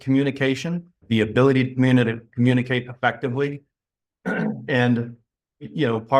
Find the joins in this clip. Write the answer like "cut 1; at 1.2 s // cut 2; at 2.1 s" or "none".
cut 1; at 1.0 s